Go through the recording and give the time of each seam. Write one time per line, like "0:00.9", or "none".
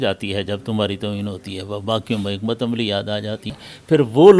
0:03.4